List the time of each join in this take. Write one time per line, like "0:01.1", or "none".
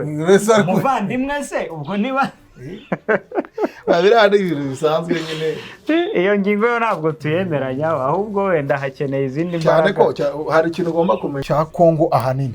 0:11.4